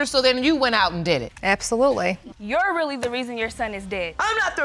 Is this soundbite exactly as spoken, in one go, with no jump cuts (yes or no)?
no